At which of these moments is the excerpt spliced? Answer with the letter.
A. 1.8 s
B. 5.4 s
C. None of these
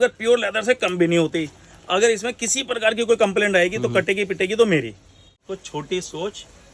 B